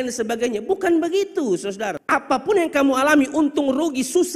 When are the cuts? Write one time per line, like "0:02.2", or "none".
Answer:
0:02.0